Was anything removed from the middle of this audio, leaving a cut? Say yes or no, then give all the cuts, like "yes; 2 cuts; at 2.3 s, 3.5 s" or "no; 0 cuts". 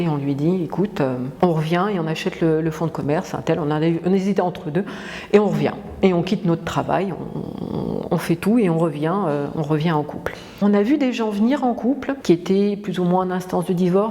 yes; 2 cuts; at 1.3 s, 10.5 s